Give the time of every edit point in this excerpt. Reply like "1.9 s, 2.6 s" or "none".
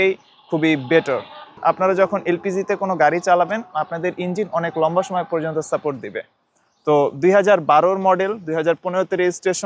none

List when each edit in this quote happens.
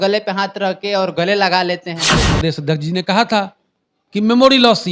2.3 s

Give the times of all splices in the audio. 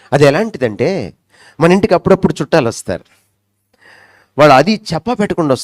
none

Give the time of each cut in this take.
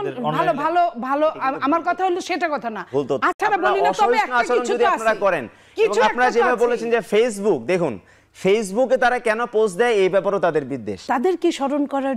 3.4 s, 10.9 s

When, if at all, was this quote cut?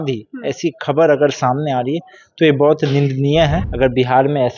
3.6 s

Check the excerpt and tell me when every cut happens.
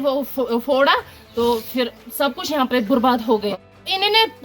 3.5 s

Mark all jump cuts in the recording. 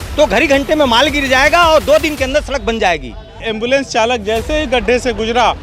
3.5 s

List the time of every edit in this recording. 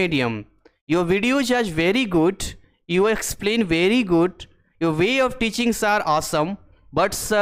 none

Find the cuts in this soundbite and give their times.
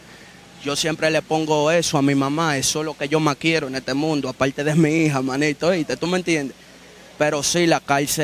none

